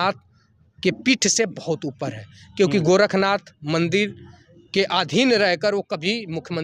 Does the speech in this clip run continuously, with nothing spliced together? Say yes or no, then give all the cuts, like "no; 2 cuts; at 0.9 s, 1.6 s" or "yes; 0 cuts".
yes; 0 cuts